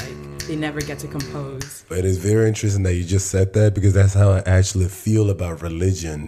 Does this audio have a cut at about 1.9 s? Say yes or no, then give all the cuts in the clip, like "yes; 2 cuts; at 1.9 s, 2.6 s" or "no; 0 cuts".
yes; 1 cut; at 1.9 s